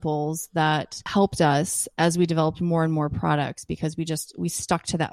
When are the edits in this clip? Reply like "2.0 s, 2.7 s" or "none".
1.0 s